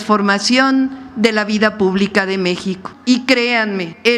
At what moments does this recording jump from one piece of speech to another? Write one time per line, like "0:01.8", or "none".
0:02.9